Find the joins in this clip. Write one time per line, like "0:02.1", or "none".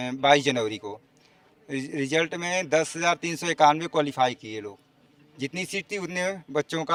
none